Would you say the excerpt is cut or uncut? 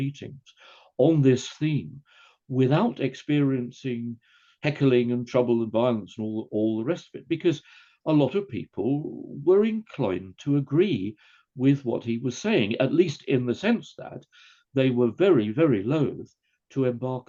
uncut